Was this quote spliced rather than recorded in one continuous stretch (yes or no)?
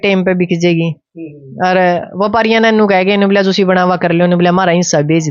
no